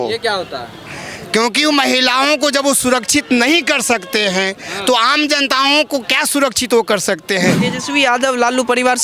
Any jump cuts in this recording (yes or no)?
yes